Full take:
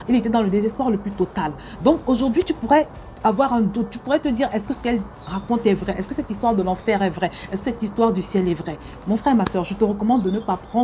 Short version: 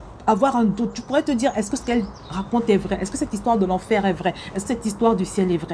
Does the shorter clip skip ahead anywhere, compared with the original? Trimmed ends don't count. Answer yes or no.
no